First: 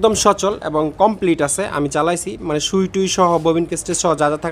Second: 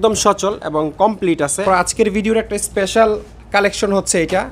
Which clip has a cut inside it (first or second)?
second